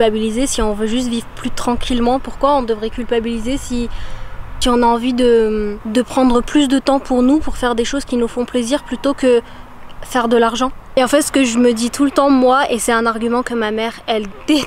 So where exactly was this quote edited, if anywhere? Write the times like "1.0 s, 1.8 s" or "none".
none